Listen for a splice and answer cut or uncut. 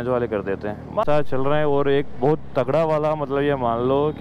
cut